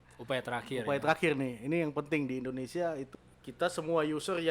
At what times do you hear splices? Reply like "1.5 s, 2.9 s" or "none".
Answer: 3.1 s